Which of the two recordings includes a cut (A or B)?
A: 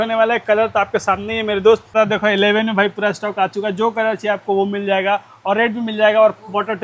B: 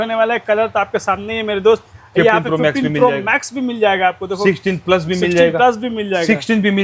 A